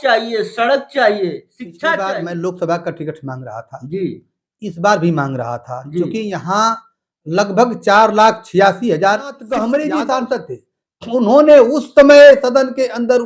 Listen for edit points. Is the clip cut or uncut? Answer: cut